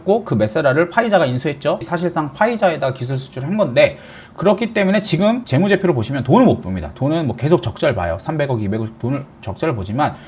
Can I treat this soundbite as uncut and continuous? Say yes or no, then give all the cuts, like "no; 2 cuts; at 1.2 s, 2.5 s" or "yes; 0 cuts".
no; 1 cut; at 1.8 s